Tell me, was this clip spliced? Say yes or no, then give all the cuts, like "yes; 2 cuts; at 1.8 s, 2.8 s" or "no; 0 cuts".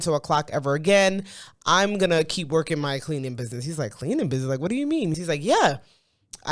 yes; 1 cut; at 5.1 s